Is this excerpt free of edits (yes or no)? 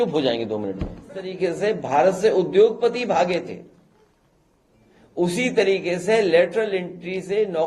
no